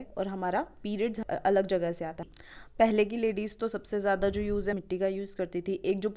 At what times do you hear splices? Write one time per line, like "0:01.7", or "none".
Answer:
0:01.2
0:02.2
0:04.8